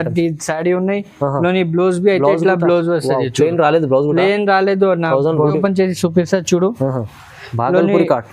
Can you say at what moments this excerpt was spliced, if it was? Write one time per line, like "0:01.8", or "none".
0:05.6

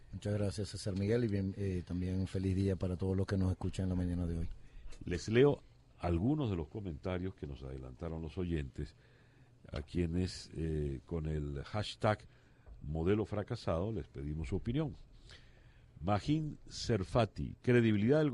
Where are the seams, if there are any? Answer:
0:06.3

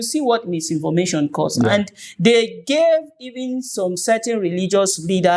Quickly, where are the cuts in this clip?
none

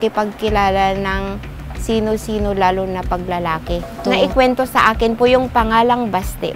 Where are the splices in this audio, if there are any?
0:03.9

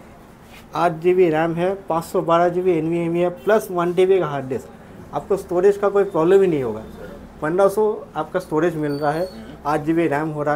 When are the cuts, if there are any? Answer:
none

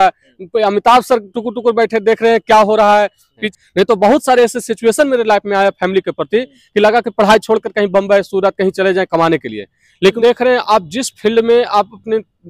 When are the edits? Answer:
0:03.4
0:10.2

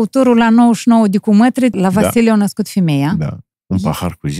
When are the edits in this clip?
0:01.7
0:03.5

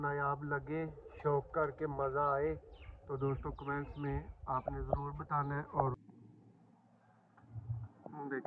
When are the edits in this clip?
0:06.0

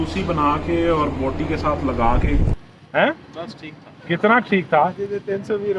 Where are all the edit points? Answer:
0:02.5

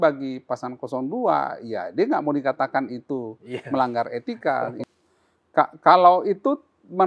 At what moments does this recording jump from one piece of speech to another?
0:04.8

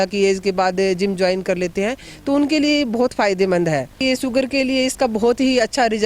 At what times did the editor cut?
0:04.0

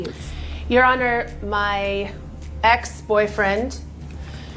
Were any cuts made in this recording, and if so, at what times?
none

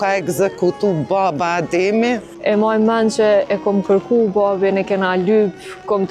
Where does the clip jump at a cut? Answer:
0:02.3

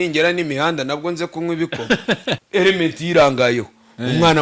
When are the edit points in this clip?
0:02.3

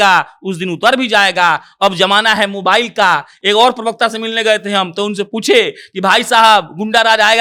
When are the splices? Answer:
none

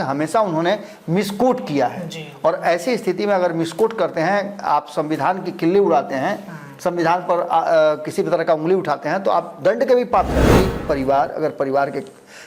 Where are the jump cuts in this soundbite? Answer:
0:10.5

